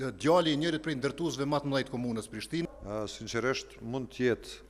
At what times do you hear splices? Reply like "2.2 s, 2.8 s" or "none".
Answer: 2.7 s